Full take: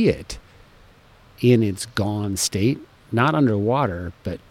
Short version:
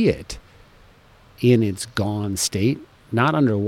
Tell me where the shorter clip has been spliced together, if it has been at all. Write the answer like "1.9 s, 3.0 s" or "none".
none